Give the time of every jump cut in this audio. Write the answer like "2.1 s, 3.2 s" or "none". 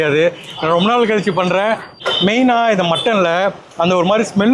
1.9 s